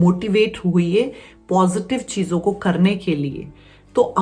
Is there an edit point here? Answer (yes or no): no